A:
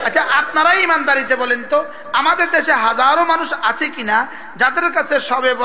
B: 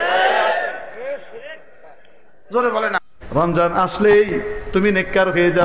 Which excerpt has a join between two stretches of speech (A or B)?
B